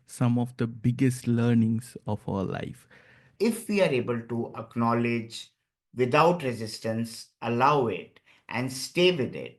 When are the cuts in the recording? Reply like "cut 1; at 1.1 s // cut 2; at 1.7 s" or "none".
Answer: cut 1; at 3.3 s